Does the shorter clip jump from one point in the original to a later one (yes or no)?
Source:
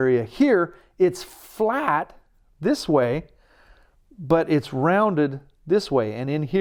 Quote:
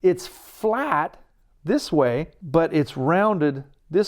yes